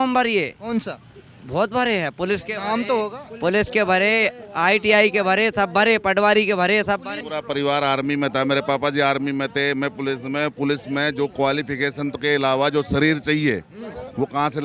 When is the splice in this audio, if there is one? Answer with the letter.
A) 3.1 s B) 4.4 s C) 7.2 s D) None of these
C